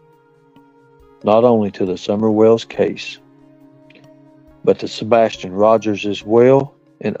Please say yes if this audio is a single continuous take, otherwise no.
no